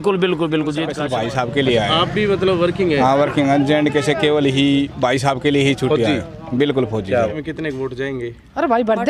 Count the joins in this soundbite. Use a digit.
2